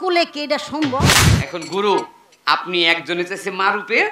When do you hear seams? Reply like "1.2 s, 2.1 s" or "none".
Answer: 1.3 s

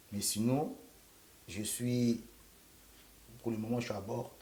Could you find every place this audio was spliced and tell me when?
none

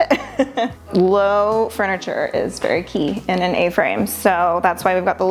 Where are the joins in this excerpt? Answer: none

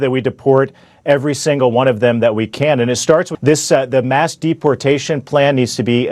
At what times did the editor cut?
3.3 s

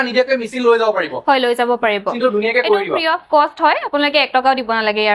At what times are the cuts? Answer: 2.1 s

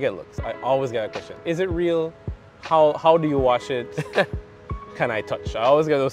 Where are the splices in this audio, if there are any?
none

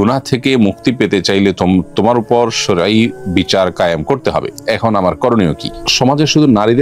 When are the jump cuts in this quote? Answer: 4.5 s, 5.7 s

